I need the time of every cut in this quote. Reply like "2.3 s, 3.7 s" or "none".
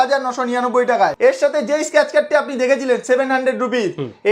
1.2 s